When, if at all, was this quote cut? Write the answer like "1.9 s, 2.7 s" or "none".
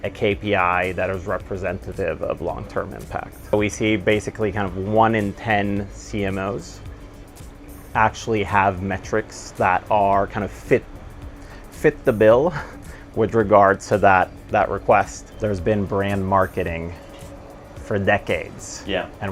3.5 s, 15.2 s